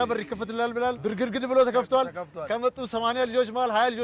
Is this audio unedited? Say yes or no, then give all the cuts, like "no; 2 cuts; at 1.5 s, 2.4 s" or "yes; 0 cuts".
no; 1 cut; at 1.0 s